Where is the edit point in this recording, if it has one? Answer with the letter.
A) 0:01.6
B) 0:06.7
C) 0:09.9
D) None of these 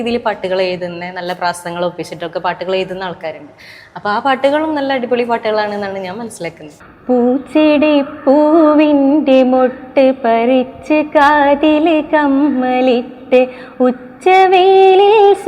B